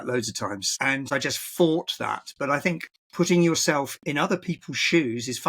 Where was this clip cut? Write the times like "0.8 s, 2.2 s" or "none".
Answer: 1.1 s, 3.0 s, 4.0 s